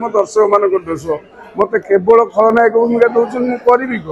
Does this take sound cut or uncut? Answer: uncut